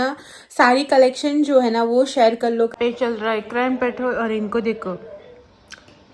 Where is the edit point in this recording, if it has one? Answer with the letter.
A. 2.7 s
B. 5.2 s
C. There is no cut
A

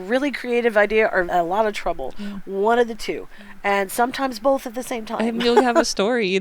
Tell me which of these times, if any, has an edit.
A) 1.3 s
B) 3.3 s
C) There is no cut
A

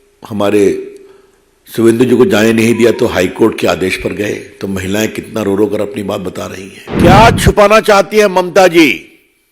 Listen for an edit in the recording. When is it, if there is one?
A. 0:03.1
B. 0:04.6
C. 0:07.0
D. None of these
C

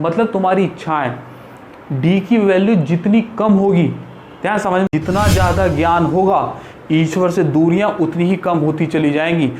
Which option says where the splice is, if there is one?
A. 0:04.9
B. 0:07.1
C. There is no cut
A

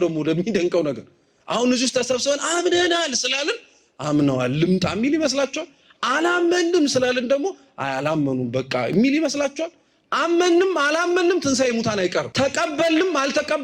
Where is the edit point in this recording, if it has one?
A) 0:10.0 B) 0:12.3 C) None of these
B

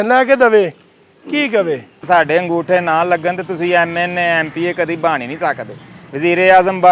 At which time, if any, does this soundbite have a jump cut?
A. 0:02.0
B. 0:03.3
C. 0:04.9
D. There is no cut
A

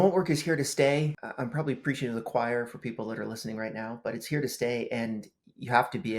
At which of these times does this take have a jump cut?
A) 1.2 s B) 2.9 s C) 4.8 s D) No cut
A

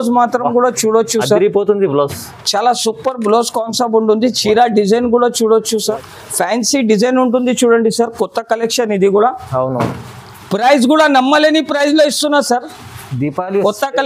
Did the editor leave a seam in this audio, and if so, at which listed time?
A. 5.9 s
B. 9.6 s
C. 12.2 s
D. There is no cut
A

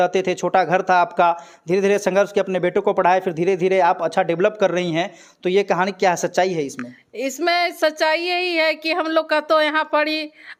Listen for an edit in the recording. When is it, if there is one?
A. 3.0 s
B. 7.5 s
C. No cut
C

